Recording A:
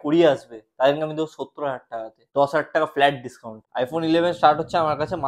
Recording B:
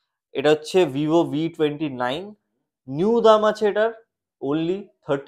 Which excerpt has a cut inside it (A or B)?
A